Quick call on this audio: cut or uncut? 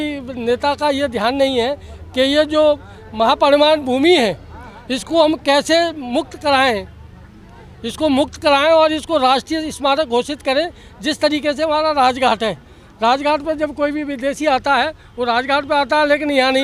uncut